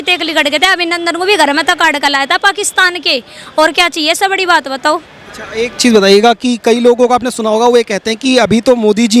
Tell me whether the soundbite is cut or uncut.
uncut